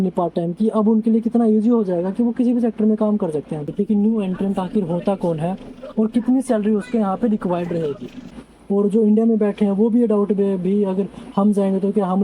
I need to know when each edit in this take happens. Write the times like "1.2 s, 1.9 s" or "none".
3.6 s, 8.4 s